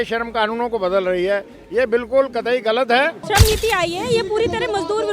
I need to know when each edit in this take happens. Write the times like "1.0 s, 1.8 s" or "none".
3.2 s